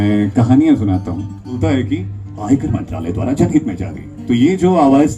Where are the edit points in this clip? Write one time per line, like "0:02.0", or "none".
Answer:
0:01.6